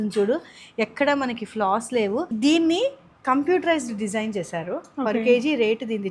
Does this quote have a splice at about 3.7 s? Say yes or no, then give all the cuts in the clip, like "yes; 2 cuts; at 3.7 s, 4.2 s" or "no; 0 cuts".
no; 1 cut; at 2.3 s